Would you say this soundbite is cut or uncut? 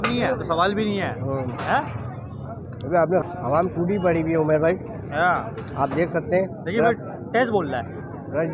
uncut